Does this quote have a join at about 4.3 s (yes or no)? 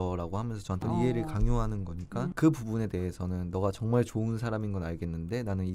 no